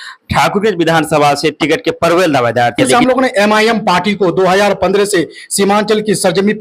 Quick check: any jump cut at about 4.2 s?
no; 1 cut; at 2.9 s

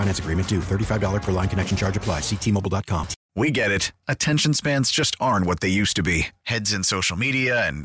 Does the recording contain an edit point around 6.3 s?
no; 1 cut; at 3.2 s

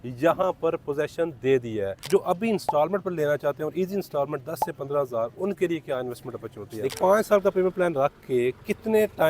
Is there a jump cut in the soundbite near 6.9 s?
yes; 2 cuts; at 2.0 s, 6.9 s

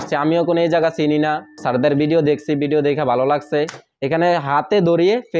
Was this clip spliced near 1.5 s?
yes; 1 cut; at 1.5 s

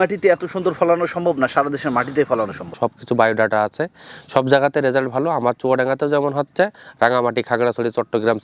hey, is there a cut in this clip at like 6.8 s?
yes; 2 cuts; at 2.7 s, 6.8 s

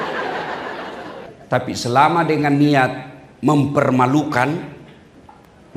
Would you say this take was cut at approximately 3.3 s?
no; 1 cut; at 1.3 s

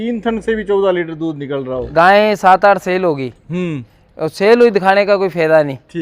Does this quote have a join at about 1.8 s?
yes; 1 cut; at 1.8 s

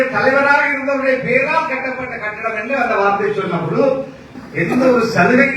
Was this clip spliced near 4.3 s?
yes; 1 cut; at 4.3 s

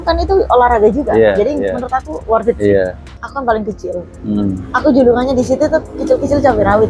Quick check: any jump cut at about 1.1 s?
no; 1 cut; at 3.1 s

